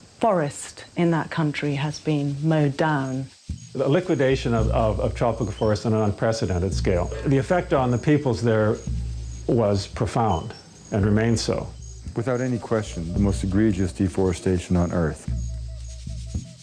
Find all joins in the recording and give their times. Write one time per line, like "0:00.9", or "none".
0:05.8